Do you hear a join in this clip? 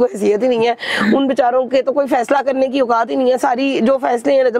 no; 0 cuts

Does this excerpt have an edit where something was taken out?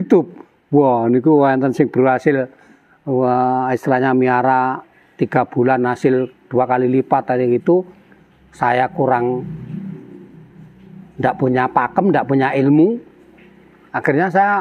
no; 0 cuts

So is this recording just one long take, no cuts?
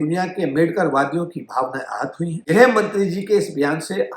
no; 1 cut; at 2.5 s

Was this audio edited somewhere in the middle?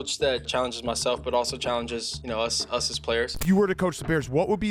yes; 1 cut; at 3.3 s

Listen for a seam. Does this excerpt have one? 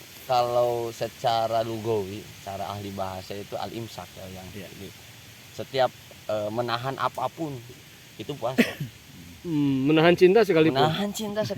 no; 0 cuts

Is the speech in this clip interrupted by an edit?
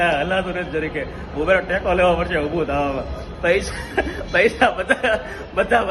no; 0 cuts

